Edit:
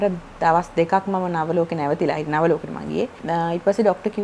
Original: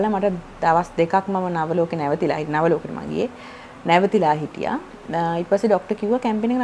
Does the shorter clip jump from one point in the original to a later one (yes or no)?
yes